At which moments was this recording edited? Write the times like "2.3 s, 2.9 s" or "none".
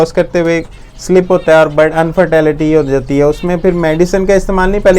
none